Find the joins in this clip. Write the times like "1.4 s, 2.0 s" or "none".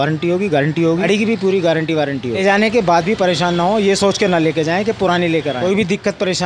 1.0 s, 2.4 s, 5.6 s